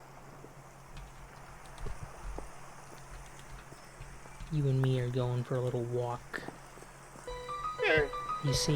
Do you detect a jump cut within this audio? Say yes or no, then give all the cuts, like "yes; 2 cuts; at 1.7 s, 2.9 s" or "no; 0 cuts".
yes; 1 cut; at 7.3 s